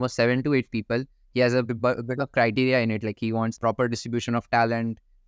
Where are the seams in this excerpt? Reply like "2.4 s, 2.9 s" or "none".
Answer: 3.6 s